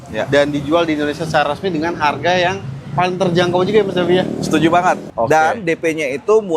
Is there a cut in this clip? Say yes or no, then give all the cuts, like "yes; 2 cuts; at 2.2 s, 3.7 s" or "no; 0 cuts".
yes; 1 cut; at 5.1 s